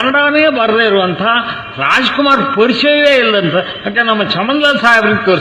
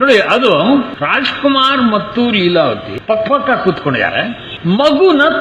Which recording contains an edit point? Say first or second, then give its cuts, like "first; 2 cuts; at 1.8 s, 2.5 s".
second; 3 cuts; at 1.0 s, 2.9 s, 4.5 s